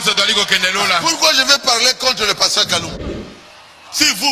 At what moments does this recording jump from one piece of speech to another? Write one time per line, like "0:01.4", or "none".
0:03.0